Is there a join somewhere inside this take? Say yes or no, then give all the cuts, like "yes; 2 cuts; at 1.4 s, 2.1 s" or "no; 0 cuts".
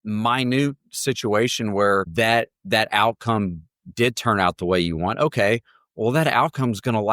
yes; 1 cut; at 2.1 s